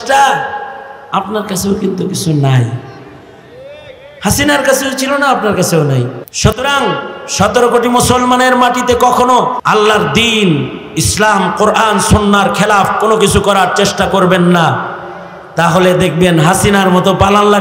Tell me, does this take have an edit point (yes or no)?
yes